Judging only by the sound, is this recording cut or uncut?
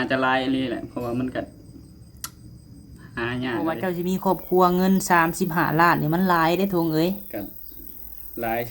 cut